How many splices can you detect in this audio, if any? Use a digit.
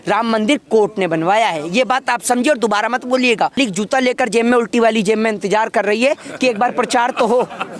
1